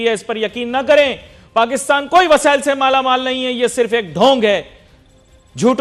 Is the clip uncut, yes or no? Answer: yes